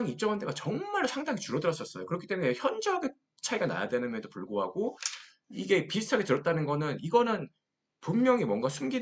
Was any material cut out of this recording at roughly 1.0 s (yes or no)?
no